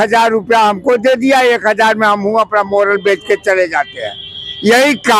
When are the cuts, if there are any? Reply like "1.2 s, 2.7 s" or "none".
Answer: none